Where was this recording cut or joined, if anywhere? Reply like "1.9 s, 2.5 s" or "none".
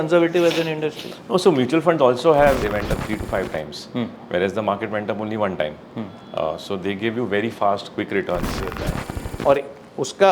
2.6 s, 8.7 s